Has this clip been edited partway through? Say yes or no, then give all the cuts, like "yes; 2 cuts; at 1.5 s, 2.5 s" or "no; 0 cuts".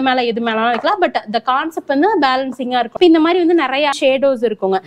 yes; 2 cuts; at 3.0 s, 4.0 s